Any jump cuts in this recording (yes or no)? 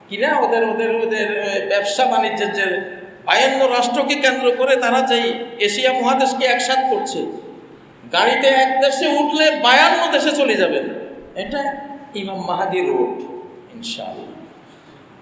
no